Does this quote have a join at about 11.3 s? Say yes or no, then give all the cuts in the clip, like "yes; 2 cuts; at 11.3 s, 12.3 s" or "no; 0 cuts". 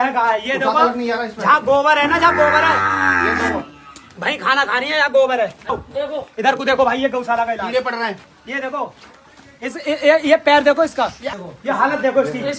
yes; 2 cuts; at 5.7 s, 11.3 s